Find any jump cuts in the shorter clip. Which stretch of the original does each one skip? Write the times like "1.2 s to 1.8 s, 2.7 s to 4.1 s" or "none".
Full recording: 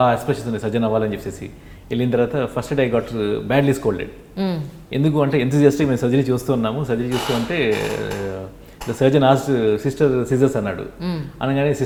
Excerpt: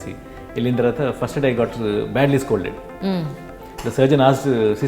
4.8 s to 8.5 s